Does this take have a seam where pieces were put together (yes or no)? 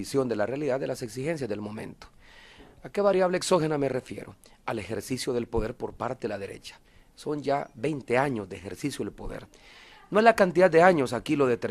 yes